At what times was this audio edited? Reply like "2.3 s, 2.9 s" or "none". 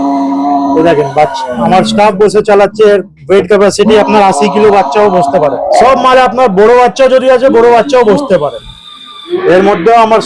5.6 s, 9.4 s